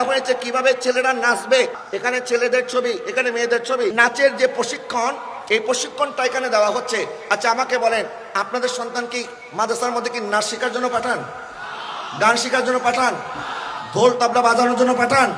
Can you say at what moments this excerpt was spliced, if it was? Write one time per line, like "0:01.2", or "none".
0:01.8
0:03.9